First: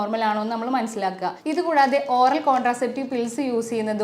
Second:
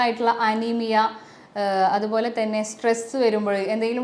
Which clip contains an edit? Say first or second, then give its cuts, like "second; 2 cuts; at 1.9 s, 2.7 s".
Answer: first; 1 cut; at 1.4 s